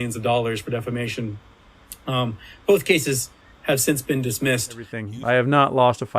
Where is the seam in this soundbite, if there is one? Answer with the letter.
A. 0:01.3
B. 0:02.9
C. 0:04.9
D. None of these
C